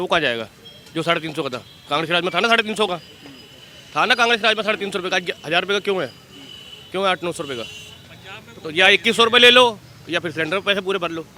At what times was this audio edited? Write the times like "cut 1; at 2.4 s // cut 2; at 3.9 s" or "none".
none